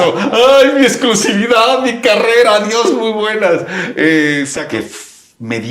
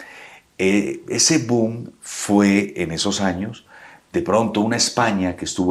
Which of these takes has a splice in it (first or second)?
first